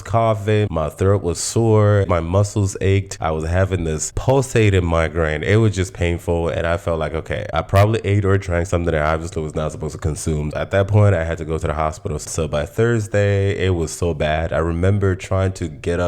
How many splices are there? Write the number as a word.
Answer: four